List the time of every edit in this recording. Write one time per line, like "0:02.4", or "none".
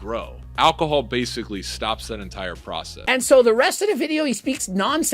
0:02.9